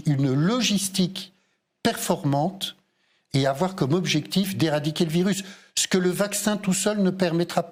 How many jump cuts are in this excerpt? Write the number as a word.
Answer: zero